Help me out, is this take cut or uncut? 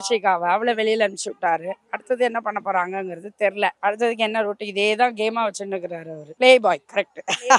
uncut